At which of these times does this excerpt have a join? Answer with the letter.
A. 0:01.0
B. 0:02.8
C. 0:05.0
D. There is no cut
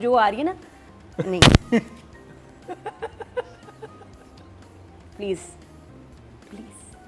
D